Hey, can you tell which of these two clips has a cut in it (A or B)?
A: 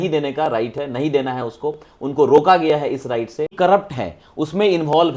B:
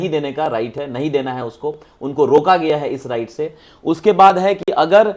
A